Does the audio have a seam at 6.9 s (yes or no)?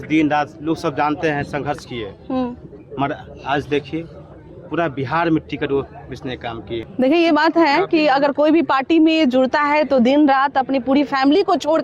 yes